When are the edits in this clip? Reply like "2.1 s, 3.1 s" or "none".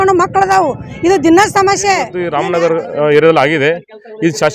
2.2 s